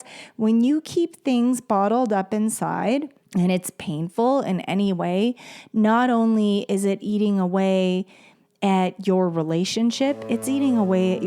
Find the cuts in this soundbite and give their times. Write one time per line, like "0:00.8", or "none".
0:03.2